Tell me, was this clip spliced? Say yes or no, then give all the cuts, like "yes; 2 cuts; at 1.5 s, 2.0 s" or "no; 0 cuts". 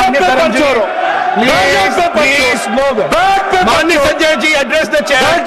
no; 0 cuts